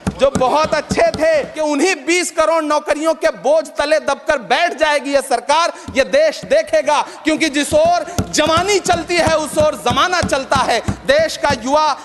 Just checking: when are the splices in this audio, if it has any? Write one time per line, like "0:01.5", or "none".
0:01.5